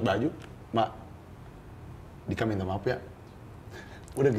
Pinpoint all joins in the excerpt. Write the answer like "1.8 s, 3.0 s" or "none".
none